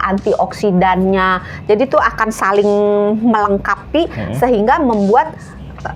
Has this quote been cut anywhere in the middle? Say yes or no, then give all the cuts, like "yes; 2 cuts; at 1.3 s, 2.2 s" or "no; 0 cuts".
no; 0 cuts